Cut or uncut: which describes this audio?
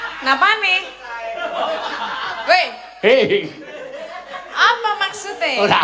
cut